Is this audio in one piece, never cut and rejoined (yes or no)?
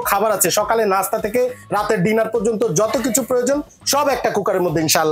yes